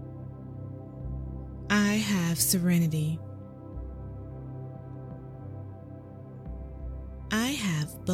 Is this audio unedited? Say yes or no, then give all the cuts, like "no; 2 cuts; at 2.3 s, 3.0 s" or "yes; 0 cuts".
no; 3 cuts; at 1.7 s, 3.2 s, 6.6 s